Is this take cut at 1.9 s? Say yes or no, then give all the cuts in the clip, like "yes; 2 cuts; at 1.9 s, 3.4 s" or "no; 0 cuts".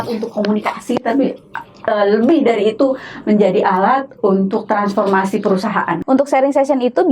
no; 1 cut; at 6.0 s